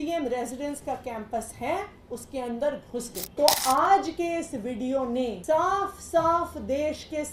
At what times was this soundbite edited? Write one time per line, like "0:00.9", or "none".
0:03.2
0:05.4